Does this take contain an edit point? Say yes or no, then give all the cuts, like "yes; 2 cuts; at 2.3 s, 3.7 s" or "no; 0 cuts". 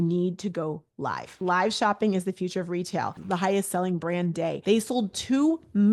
yes; 3 cuts; at 1.3 s, 3.2 s, 4.6 s